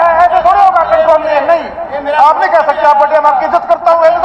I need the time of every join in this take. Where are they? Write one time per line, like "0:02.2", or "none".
none